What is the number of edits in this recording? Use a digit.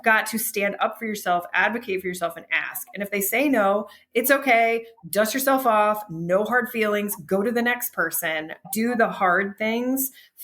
1